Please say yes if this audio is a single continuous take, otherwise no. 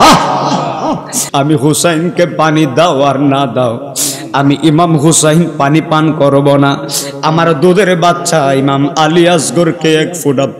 no